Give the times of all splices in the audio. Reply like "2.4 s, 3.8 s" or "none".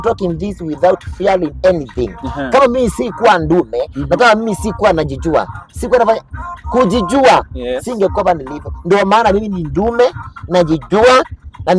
none

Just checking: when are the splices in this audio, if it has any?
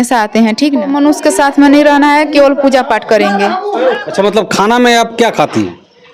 0.9 s, 4.0 s

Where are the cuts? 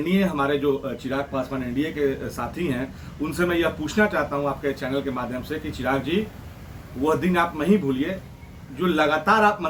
none

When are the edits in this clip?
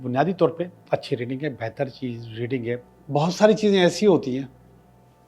2.9 s

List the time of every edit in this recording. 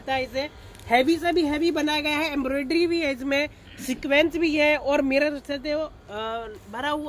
none

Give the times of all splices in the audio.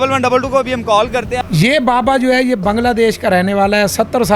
1.4 s

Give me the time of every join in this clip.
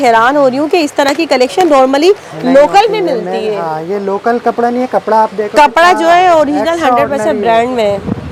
none

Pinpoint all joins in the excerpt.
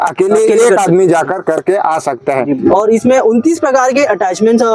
2.7 s

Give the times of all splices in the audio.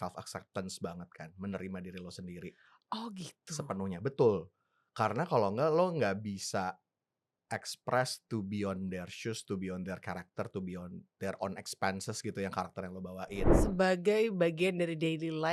13.5 s

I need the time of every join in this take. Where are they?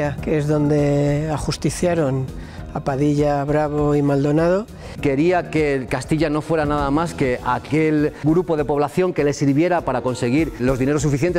4.8 s

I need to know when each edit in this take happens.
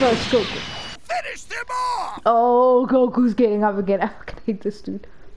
1.0 s

